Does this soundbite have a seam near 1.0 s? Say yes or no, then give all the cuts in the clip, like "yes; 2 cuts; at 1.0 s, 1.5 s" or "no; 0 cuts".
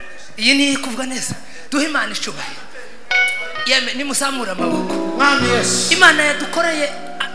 no; 0 cuts